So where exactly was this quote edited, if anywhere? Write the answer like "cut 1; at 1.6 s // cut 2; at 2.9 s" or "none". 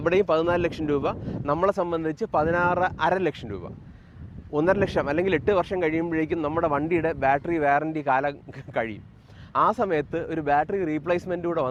none